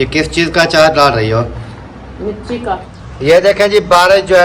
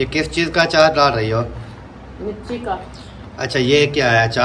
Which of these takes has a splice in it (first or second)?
first